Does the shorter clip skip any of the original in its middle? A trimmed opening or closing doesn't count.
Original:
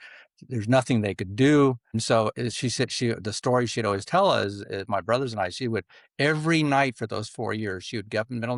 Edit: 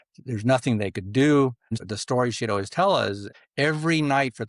yes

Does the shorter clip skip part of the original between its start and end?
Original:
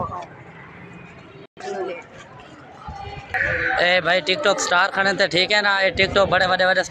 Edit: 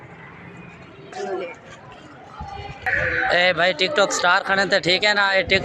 yes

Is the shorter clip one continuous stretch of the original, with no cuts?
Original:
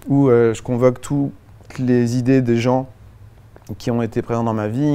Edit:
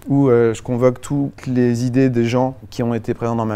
no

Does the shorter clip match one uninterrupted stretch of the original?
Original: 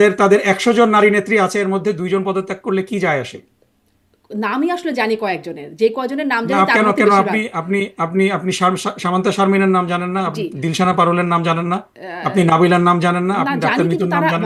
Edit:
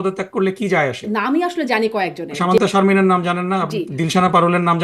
no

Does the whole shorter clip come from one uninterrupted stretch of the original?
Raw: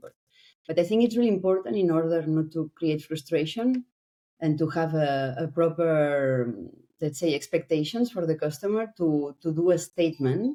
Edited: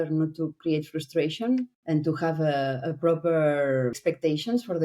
no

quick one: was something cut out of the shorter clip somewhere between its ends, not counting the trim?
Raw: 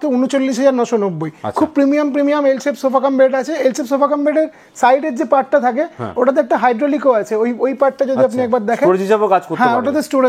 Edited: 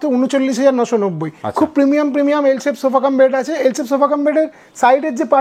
no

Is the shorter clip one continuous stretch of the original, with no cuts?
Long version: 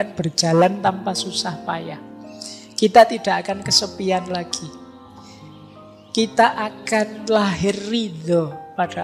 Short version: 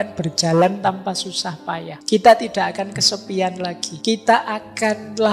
no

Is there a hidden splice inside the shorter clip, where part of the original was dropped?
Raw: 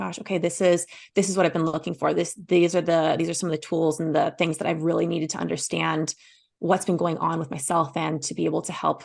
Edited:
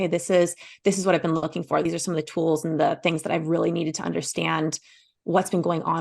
yes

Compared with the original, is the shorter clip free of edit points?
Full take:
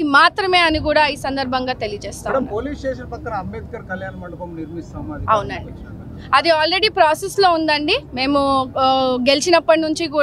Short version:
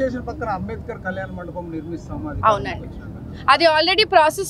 yes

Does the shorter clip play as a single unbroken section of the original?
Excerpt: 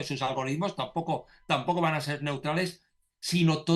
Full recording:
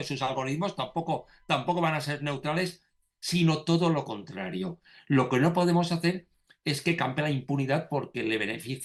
yes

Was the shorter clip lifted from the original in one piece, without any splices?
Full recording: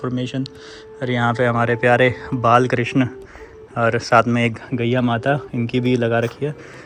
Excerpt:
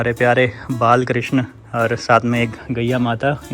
no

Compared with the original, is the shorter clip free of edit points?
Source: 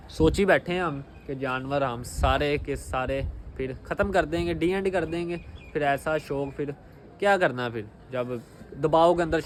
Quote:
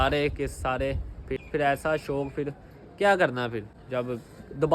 no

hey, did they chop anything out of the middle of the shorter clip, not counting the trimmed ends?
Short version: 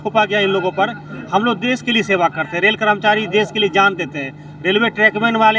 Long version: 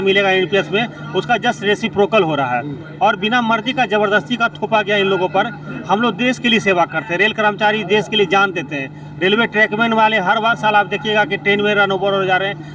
no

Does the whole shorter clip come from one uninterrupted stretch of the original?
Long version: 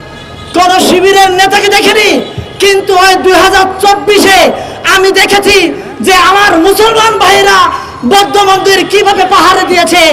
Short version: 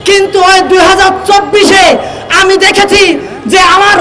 yes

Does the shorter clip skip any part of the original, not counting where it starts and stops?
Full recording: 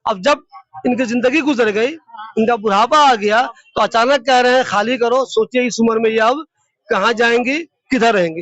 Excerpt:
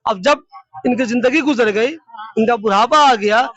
no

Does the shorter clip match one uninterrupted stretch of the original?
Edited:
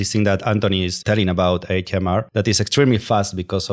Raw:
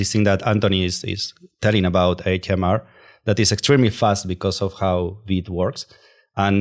no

